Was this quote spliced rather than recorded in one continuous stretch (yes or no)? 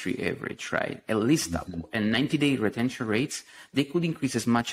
no